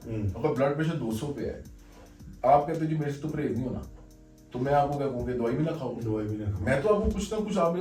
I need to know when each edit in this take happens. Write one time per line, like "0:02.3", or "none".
none